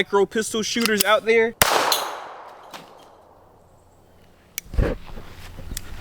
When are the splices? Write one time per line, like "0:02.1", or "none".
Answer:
0:01.5